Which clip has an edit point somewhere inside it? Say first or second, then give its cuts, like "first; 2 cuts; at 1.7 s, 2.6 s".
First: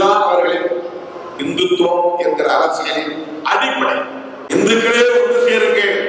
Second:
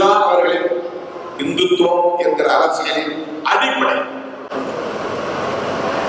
first; 1 cut; at 4.4 s